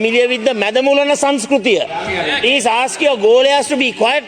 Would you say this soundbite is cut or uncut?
cut